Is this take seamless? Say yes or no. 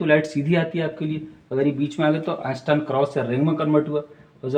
yes